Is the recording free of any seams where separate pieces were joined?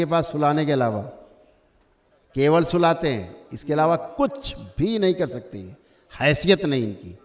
yes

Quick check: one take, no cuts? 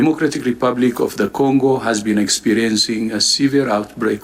yes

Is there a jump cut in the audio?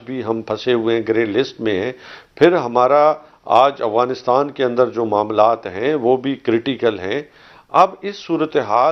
no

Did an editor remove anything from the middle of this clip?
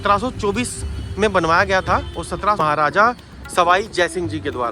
yes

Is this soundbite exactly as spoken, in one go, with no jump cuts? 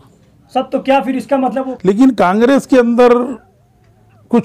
no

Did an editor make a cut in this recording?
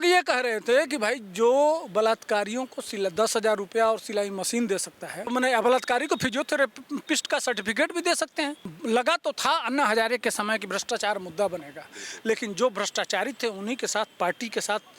yes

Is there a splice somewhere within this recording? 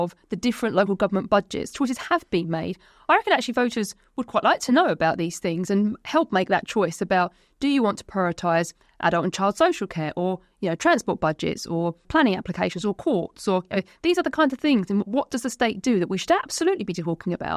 yes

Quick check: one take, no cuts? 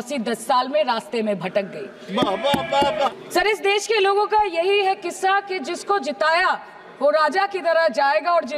no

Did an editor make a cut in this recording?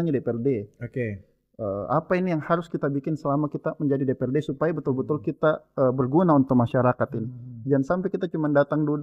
no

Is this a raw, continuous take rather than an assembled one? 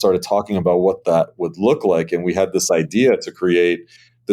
yes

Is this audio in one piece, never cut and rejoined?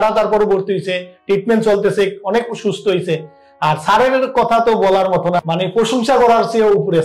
no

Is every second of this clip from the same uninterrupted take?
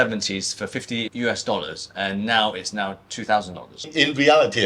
no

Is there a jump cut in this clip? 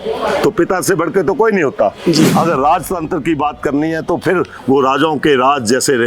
yes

